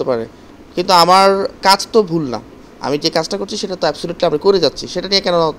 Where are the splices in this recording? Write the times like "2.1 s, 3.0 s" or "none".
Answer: none